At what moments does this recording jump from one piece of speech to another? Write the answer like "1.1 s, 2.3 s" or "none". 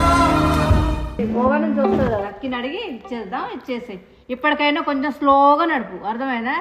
1.1 s